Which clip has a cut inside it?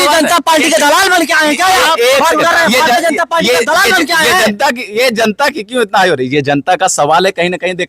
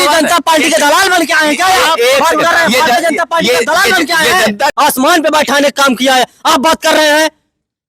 second; 1 cut; at 4.7 s

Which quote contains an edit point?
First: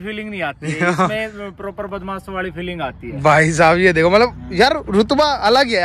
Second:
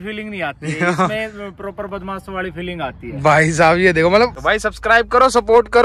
second; 1 cut; at 4.4 s

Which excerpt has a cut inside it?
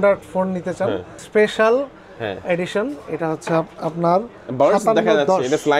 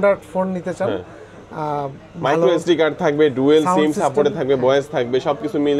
first; 1 cut; at 1.2 s

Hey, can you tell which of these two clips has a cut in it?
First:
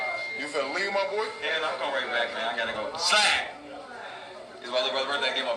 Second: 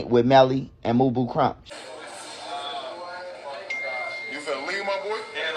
second; 1 cut; at 1.6 s

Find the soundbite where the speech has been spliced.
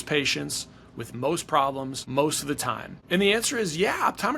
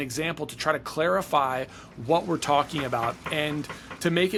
first; 2 cuts; at 2.0 s, 2.9 s

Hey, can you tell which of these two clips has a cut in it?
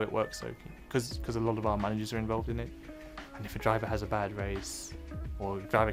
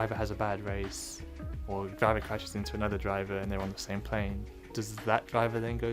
second; 1 cut; at 4.5 s

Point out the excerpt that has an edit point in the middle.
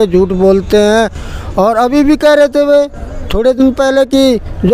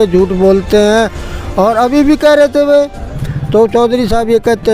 second; 1 cut; at 3.2 s

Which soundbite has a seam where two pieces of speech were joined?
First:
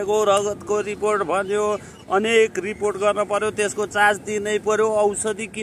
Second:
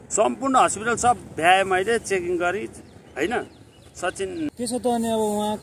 second; 1 cut; at 4.5 s

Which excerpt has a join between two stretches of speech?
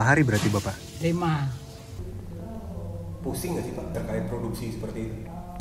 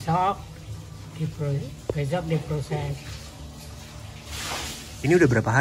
first; 2 cuts; at 2.0 s, 3.9 s

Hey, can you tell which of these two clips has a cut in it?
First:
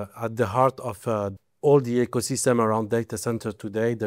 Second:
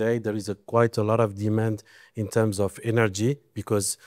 first; 1 cut; at 1.3 s

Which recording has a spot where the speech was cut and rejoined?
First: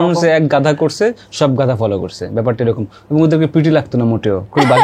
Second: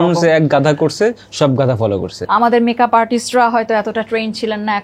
second; 1 cut; at 2.1 s

